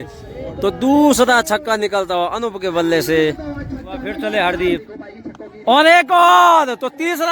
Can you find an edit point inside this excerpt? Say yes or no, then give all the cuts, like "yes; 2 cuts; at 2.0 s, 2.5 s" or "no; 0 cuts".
yes; 1 cut; at 4.2 s